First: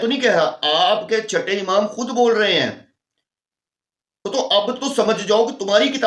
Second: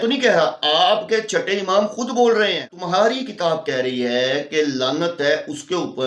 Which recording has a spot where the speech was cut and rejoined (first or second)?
second